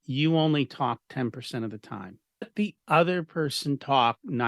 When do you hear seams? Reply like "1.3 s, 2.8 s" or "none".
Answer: 2.5 s